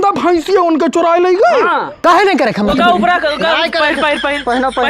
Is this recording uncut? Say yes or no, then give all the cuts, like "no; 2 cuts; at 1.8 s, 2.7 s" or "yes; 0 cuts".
no; 1 cut; at 1.9 s